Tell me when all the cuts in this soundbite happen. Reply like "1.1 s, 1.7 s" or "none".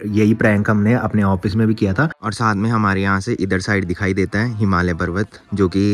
2.1 s